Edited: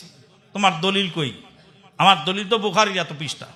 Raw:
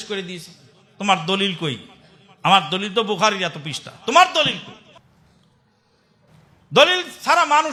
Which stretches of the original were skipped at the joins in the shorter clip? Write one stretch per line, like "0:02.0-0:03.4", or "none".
none